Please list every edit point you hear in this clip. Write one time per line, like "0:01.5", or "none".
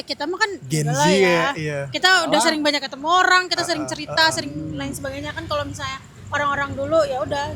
none